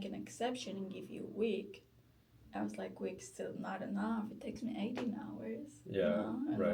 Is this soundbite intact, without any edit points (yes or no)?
yes